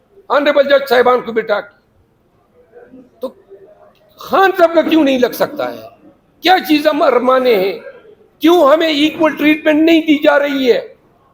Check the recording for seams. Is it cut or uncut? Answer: uncut